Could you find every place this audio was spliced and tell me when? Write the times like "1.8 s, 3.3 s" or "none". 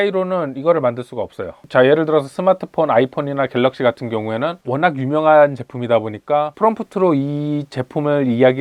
none